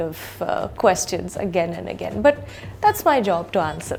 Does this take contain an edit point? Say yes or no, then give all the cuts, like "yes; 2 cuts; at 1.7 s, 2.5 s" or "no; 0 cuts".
no; 0 cuts